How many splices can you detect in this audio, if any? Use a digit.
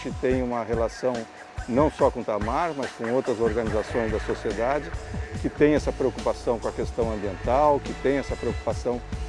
0